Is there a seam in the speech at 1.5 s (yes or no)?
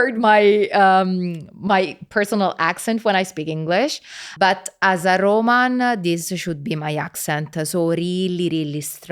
no